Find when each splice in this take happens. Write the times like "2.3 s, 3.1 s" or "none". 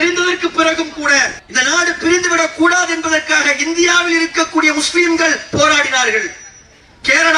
none